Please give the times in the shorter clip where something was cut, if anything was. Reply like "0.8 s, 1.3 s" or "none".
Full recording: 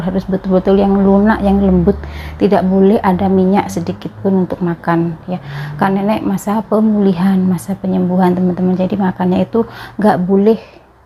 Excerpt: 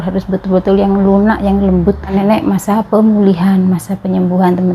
2.1 s